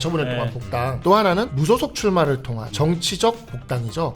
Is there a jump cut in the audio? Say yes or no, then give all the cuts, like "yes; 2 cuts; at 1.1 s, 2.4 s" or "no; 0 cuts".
yes; 3 cuts; at 0.9 s, 1.5 s, 2.6 s